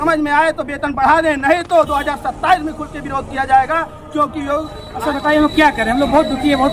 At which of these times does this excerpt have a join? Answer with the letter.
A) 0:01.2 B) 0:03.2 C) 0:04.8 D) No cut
C